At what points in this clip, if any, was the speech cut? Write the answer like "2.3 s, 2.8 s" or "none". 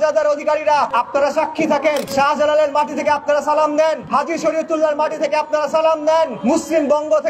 0.9 s, 2.1 s, 4.0 s, 6.4 s